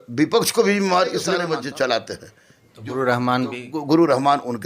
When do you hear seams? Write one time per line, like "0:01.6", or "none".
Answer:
0:01.4